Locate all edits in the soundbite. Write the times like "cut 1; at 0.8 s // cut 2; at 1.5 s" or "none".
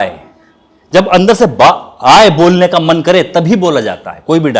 none